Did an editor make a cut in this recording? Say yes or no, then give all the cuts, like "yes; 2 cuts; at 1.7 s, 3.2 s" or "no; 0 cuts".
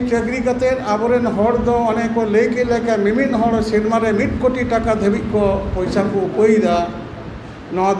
no; 0 cuts